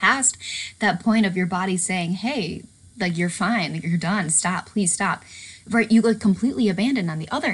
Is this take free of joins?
yes; 0 cuts

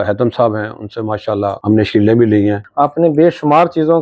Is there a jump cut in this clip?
yes; 2 cuts; at 1.6 s, 2.6 s

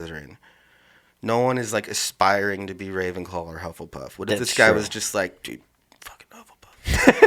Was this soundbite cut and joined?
no; 0 cuts

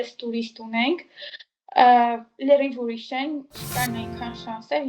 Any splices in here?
yes; 1 cut; at 3.5 s

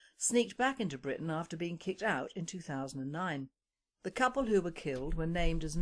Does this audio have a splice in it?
no; 0 cuts

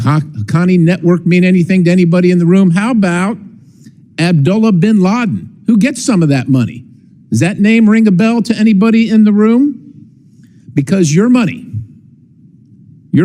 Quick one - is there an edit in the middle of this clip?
no; 0 cuts

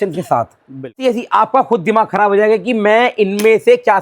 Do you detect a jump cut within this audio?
yes; 1 cut; at 1.0 s

